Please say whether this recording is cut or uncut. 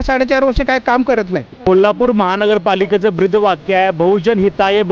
cut